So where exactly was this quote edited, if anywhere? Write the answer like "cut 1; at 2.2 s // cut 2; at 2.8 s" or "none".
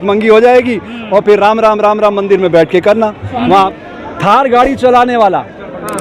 cut 1; at 3.7 s